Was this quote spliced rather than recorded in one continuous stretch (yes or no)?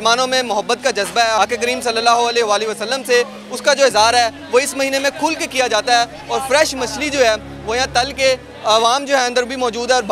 yes